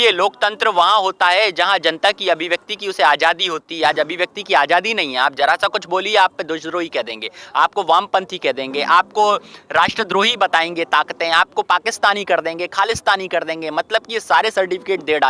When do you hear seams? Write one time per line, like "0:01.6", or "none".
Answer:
none